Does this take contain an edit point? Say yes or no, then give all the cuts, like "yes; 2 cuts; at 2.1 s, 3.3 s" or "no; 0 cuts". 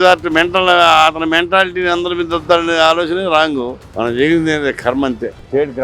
yes; 1 cut; at 3.8 s